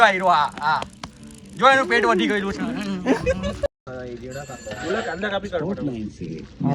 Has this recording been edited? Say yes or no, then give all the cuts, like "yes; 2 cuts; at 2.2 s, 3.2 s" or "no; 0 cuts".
yes; 1 cut; at 3.8 s